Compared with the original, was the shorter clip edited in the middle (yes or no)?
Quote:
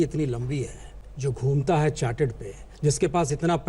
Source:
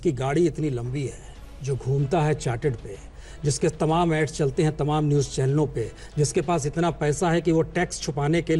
yes